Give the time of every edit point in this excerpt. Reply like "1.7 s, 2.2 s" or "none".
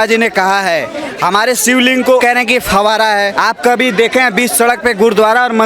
2.2 s, 3.3 s